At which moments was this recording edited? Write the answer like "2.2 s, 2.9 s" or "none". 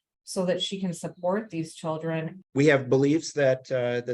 2.3 s